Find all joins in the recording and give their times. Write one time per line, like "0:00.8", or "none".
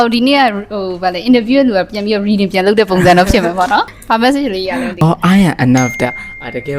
0:04.0
0:05.0